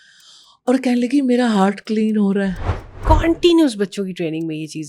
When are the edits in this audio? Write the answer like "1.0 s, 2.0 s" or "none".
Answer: 2.9 s